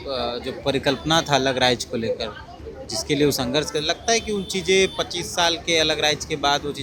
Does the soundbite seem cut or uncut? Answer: uncut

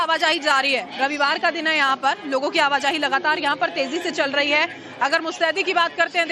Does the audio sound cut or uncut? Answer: cut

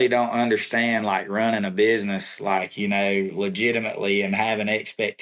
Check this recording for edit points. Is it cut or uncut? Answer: uncut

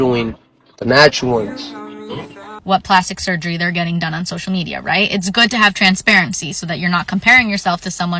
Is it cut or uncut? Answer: cut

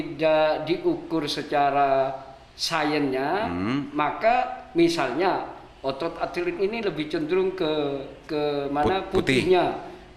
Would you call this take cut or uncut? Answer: uncut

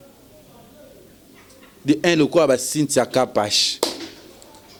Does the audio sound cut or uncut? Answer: uncut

